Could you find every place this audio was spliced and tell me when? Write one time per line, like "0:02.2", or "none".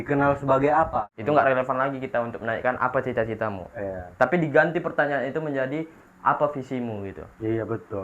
0:00.9